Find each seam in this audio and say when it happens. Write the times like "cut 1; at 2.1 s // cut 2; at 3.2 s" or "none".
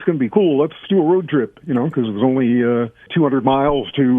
cut 1; at 0.8 s // cut 2; at 3.1 s